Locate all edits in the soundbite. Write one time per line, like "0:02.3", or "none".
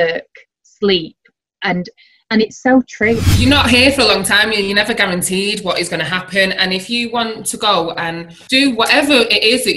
0:03.2
0:08.3